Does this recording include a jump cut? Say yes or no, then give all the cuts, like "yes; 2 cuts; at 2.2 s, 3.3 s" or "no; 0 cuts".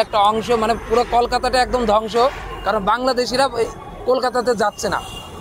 no; 0 cuts